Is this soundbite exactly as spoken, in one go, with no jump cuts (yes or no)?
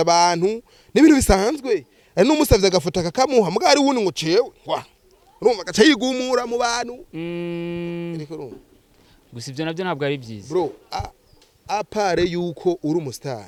yes